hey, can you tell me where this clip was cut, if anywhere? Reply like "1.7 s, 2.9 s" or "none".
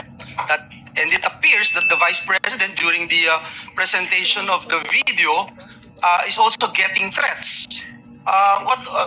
none